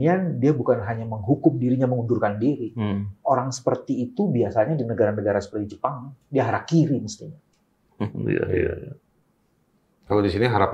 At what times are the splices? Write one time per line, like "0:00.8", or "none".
none